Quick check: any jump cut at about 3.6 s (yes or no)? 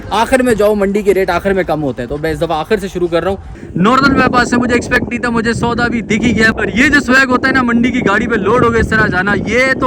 yes